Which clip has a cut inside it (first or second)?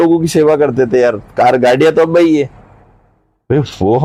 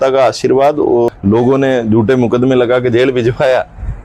second